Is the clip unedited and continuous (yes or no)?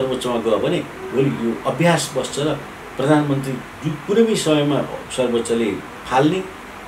yes